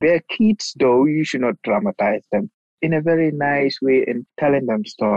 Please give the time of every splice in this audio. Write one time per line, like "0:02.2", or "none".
0:02.7
0:04.2